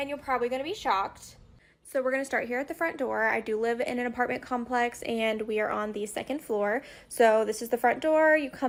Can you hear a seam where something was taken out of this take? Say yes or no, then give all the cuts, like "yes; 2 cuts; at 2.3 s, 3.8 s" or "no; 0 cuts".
no; 0 cuts